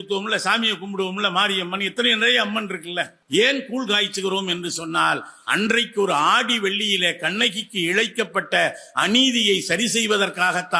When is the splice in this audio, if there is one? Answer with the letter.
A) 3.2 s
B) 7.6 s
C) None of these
A